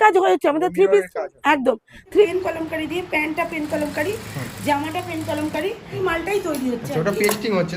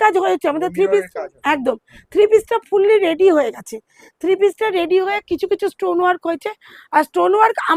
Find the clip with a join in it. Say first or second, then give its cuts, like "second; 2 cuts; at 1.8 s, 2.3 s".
first; 2 cuts; at 2.2 s, 5.9 s